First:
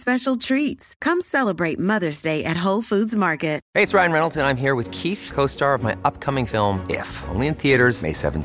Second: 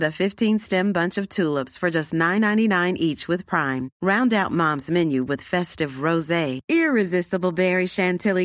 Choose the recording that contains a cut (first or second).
first